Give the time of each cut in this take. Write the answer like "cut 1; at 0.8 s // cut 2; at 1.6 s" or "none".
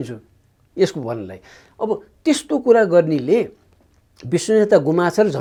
none